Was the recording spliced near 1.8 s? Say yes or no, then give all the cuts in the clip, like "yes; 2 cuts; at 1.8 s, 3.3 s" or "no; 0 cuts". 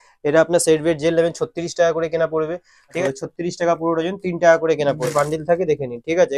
no; 2 cuts; at 3.0 s, 5.1 s